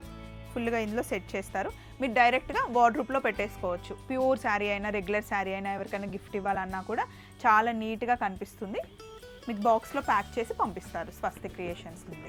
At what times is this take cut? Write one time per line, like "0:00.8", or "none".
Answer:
none